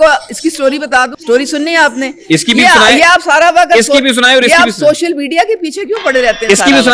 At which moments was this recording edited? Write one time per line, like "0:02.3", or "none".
0:01.2